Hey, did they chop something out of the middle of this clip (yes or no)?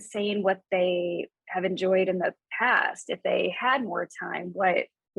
yes